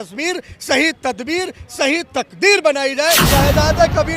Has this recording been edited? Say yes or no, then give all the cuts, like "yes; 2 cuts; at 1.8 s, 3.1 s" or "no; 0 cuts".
yes; 1 cut; at 3.1 s